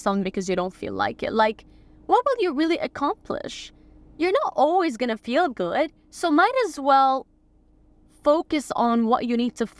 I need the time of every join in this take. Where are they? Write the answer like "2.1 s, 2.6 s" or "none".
none